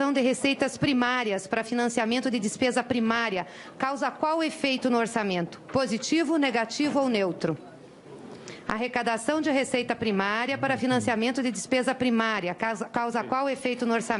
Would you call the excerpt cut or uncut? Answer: uncut